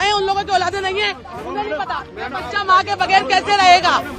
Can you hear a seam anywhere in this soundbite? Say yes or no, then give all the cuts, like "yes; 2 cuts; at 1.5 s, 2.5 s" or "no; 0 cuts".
no; 0 cuts